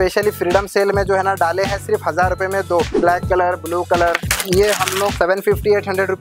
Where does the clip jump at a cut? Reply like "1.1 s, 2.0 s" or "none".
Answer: 3.0 s, 4.3 s, 5.1 s

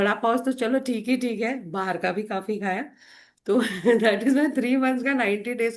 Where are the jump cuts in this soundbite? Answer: none

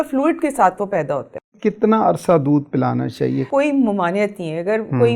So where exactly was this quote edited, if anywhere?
1.5 s, 3.4 s

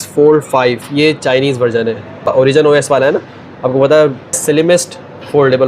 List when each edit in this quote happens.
2.3 s, 4.4 s

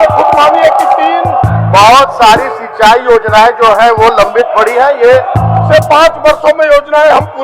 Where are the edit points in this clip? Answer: 1.5 s, 5.4 s

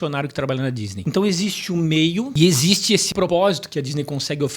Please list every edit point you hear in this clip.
1.0 s, 2.3 s, 3.2 s

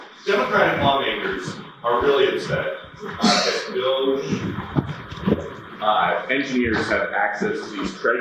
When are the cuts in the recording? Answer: none

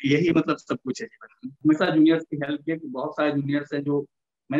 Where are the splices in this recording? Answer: 1.5 s

